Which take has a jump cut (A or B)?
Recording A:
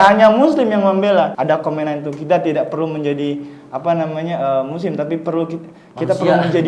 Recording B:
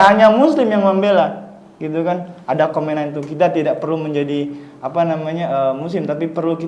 A